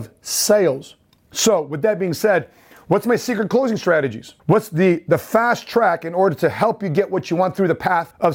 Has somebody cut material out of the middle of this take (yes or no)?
no